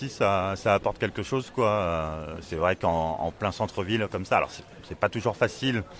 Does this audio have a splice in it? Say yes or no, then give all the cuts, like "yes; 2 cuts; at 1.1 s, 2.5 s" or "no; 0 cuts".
no; 0 cuts